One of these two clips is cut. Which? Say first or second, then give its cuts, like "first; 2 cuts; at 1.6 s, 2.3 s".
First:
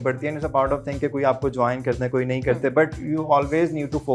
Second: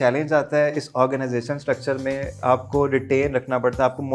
second; 1 cut; at 2.4 s